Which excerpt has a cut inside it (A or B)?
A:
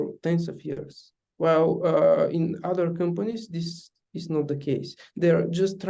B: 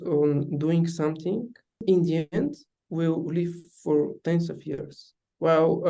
B